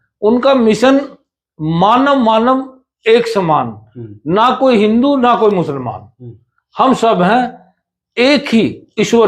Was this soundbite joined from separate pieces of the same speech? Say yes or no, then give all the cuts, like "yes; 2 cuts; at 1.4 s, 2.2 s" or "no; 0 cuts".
no; 0 cuts